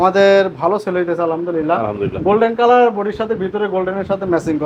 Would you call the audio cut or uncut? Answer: uncut